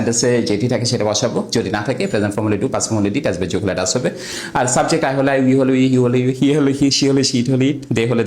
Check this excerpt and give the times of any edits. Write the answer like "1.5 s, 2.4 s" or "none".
5.9 s